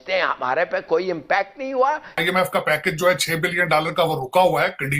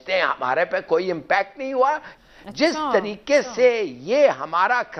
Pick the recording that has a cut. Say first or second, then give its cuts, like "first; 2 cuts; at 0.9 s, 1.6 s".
first; 1 cut; at 2.1 s